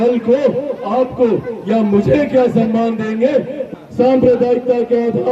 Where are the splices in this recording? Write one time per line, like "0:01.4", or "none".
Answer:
0:03.6